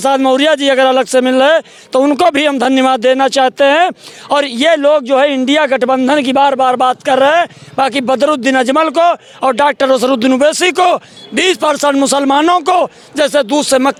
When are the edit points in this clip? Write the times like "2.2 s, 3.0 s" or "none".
none